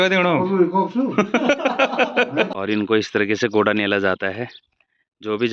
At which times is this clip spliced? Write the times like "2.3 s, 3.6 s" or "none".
2.5 s